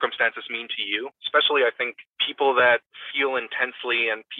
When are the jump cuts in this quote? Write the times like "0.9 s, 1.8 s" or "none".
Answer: 1.2 s, 3.0 s